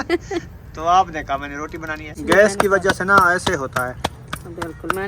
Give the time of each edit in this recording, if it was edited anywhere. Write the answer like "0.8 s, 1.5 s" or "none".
2.2 s

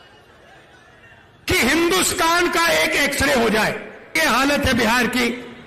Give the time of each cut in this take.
4.2 s

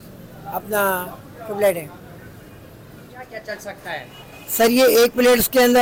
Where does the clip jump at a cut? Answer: 3.3 s

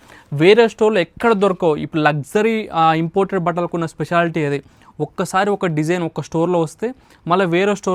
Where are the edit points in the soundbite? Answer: none

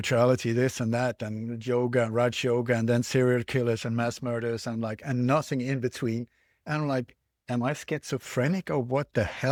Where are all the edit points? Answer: none

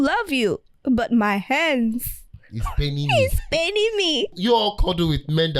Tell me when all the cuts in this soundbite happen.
4.3 s

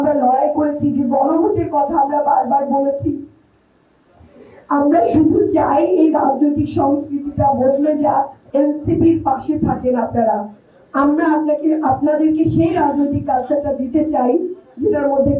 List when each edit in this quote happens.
8.4 s

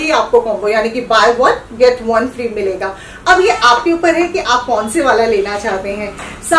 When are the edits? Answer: none

